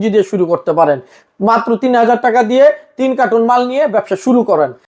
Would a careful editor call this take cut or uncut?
uncut